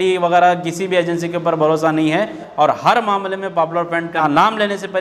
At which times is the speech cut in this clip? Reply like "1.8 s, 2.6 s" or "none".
2.4 s, 4.2 s